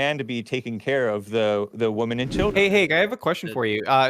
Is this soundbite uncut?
no; 1 cut; at 2.5 s

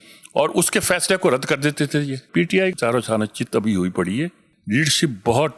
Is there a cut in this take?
yes; 1 cut; at 2.6 s

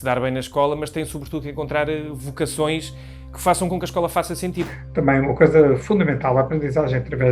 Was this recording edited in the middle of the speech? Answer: yes; 1 cut; at 4.8 s

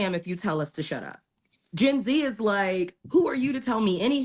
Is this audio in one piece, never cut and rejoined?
no; 1 cut; at 3.3 s

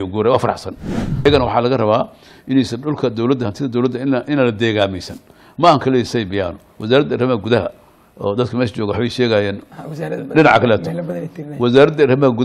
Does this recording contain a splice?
yes; 1 cut; at 1.2 s

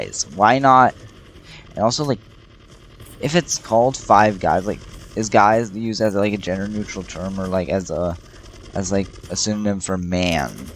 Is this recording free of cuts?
yes; 0 cuts

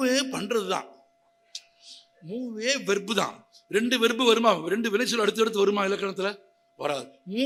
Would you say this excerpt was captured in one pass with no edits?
yes; 0 cuts

